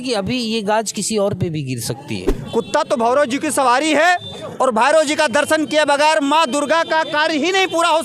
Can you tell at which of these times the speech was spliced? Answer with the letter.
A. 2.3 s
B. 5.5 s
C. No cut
A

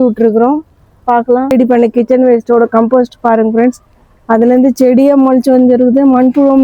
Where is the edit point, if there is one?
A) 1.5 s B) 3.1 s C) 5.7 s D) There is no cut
A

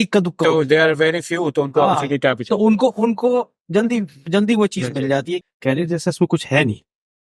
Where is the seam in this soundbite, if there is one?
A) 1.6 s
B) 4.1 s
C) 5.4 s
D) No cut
C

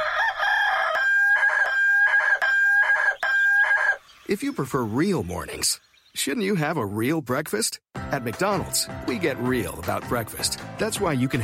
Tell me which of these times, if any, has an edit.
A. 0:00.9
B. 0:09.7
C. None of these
A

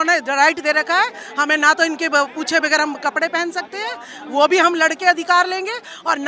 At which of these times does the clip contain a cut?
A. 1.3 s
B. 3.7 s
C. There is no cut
C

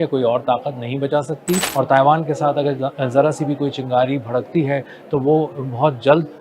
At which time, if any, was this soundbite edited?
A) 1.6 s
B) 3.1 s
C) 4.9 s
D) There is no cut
A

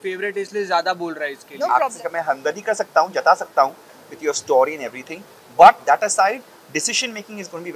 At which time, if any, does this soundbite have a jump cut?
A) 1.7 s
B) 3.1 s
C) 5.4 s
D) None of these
A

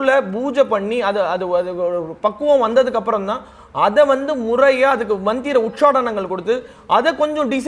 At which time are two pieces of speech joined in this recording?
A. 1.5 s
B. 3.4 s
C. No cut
C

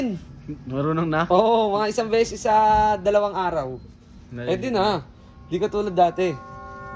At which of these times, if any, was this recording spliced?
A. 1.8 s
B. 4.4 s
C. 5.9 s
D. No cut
D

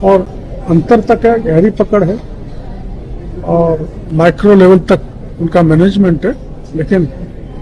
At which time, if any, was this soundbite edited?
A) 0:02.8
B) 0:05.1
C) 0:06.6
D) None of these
C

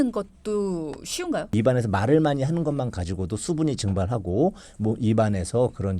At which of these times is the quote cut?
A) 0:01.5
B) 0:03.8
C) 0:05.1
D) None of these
A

